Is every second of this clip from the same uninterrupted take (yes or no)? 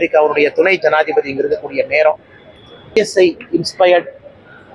no